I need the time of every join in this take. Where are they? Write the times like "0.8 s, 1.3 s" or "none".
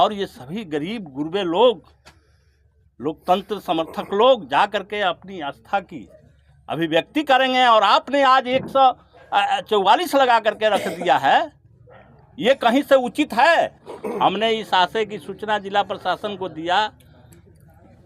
13.9 s